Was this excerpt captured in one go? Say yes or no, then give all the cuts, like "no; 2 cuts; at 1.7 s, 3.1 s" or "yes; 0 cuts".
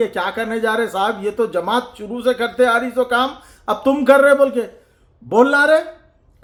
yes; 0 cuts